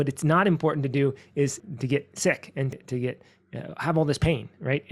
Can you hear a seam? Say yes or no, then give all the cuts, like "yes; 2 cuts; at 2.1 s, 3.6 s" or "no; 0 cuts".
yes; 2 cuts; at 1.6 s, 2.7 s